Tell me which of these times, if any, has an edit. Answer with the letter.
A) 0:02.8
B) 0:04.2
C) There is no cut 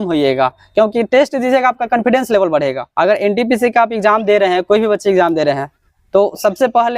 A